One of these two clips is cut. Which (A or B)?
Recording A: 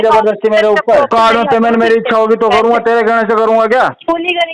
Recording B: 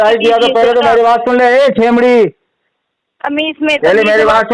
A